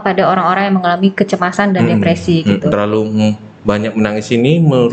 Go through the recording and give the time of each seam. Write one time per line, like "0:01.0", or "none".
0:02.7